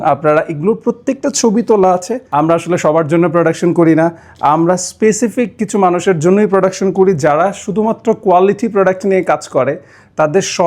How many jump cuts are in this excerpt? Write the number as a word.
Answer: one